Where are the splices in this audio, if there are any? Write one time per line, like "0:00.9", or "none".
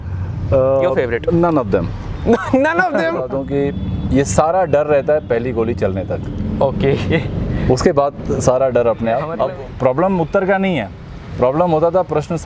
0:01.2
0:03.3
0:09.3